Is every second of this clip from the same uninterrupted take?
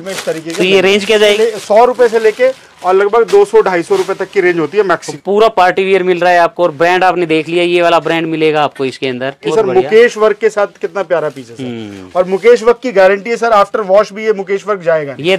no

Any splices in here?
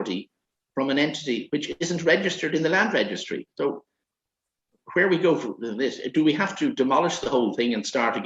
no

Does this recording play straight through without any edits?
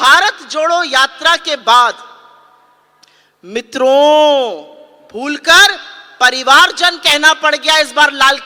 yes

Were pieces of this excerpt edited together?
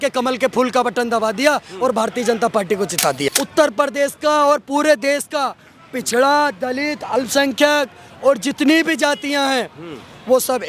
yes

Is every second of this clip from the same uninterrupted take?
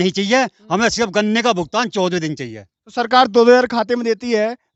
yes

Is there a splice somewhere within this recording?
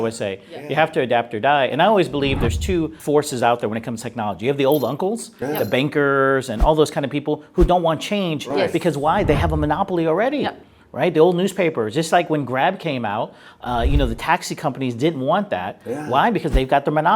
yes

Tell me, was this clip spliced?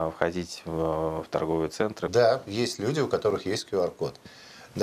yes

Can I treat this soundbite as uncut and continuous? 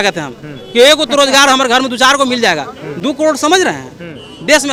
yes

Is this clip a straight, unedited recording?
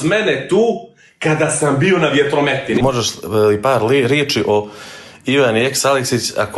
no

